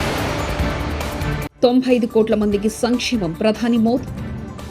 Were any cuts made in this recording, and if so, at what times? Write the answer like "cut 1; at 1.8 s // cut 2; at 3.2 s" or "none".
cut 1; at 1.5 s